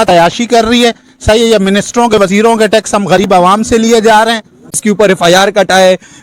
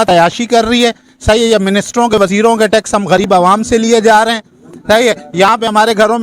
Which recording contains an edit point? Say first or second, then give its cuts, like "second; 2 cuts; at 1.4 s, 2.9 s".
first; 1 cut; at 4.7 s